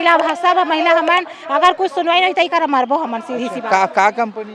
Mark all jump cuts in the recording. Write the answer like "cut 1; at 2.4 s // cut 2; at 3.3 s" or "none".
none